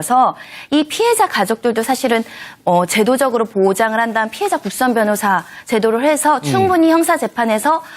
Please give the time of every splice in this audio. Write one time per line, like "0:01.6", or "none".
0:04.4